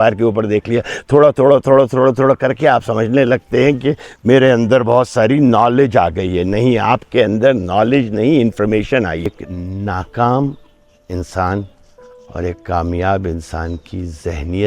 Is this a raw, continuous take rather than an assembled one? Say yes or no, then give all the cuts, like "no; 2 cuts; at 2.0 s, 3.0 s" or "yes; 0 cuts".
no; 1 cut; at 9.3 s